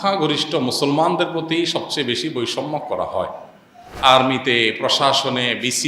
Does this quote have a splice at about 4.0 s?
yes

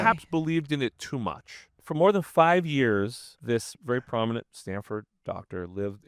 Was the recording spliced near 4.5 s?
yes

